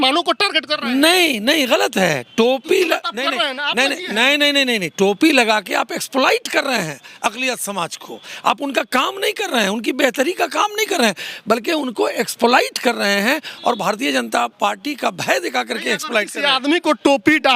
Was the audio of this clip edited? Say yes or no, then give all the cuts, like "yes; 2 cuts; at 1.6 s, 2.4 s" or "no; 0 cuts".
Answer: no; 0 cuts